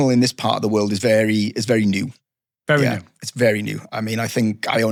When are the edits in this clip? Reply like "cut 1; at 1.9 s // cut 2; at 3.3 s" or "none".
none

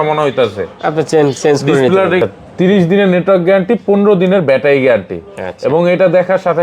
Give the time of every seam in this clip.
cut 1; at 2.2 s

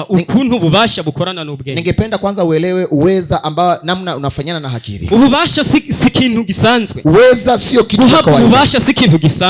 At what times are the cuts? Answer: cut 1; at 5.0 s // cut 2; at 6.9 s

